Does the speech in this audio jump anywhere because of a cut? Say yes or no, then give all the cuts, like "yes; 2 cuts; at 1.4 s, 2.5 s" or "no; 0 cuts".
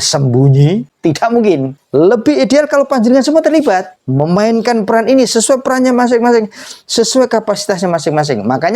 yes; 3 cuts; at 0.9 s, 1.8 s, 4.0 s